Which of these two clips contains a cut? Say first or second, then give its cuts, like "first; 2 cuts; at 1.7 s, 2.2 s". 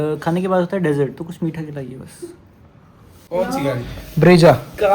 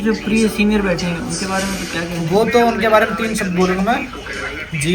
first; 1 cut; at 3.1 s